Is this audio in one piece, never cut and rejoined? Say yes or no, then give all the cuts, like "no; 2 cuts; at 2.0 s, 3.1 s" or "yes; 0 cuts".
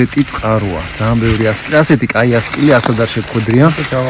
yes; 0 cuts